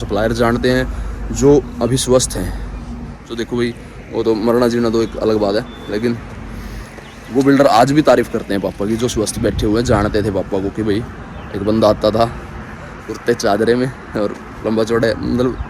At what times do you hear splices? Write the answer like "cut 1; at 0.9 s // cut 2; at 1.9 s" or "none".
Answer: none